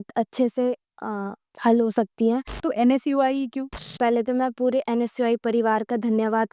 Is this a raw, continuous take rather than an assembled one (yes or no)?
no